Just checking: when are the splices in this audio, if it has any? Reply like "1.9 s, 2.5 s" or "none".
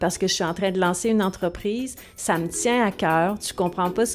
none

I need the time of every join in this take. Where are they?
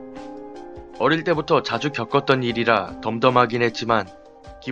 1.0 s

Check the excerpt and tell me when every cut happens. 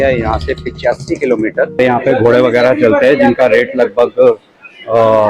1.8 s

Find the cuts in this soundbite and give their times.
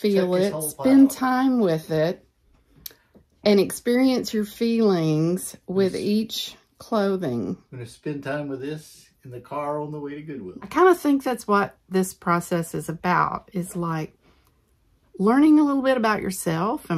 10.6 s

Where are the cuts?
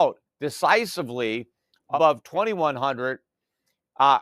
1.9 s

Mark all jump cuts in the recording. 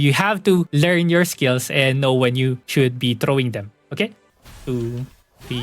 2.6 s, 4.3 s

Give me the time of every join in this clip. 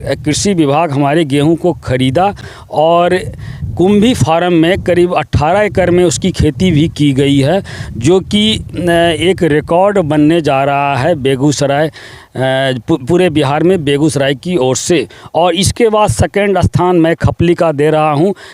none

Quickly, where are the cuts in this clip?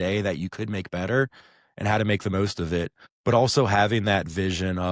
3.0 s

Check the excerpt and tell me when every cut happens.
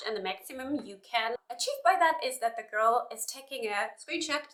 none

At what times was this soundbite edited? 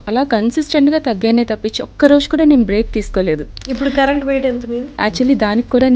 3.6 s, 4.9 s

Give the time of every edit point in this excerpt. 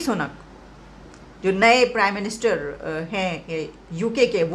none

